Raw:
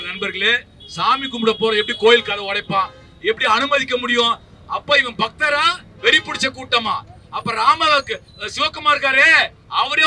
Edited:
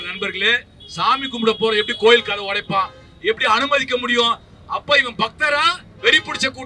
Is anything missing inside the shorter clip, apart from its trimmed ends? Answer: no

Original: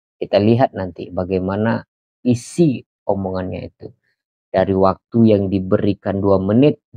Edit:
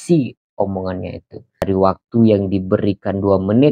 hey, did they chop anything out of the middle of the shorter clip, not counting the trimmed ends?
yes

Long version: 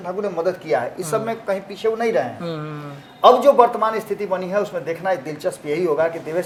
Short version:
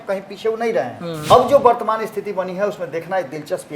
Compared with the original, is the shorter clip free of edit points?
no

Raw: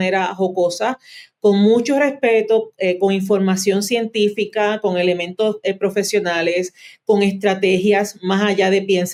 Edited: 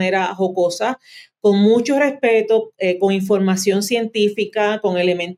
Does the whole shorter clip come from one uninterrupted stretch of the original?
yes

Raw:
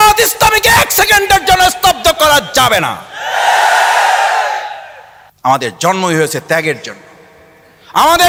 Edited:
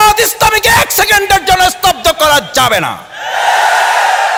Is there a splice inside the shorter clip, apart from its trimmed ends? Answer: no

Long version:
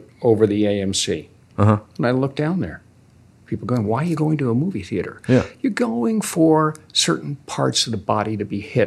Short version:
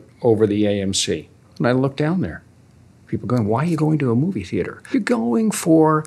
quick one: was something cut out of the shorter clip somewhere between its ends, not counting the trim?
yes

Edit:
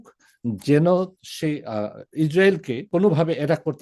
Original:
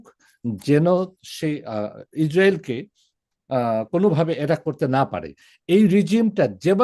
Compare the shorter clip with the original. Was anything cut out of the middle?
yes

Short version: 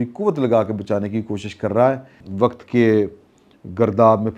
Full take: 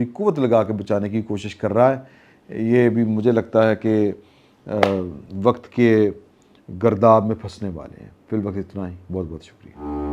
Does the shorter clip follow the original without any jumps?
no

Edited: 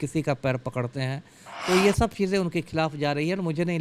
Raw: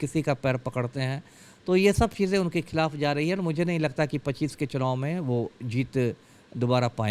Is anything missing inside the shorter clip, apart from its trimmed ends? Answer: no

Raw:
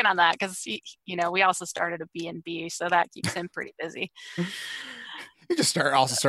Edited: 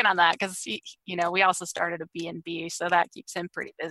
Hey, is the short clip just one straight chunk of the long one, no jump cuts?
yes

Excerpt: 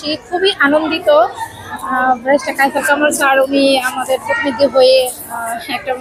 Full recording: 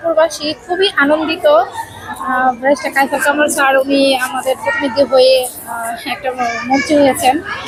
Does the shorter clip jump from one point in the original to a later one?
no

